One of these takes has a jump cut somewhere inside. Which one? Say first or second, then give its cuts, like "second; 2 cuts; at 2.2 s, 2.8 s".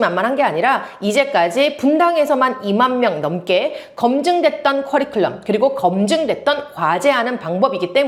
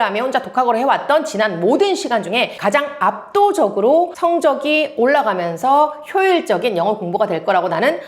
second; 2 cuts; at 2.5 s, 4.1 s